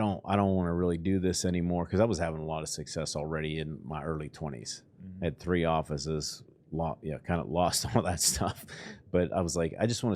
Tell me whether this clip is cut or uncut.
uncut